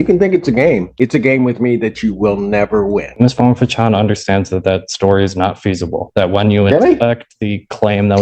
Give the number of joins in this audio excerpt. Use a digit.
1